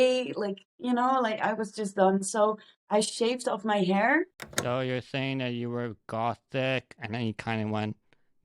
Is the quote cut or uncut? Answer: cut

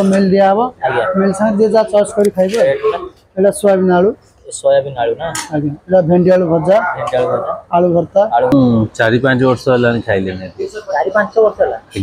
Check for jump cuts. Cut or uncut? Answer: cut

